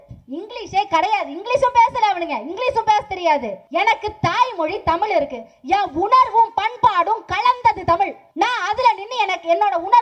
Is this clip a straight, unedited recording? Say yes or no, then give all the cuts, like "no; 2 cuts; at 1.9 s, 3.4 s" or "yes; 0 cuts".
no; 2 cuts; at 3.6 s, 8.2 s